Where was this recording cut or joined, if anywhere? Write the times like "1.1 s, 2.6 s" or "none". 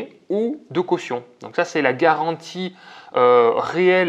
none